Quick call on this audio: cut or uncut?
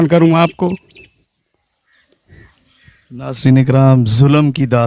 uncut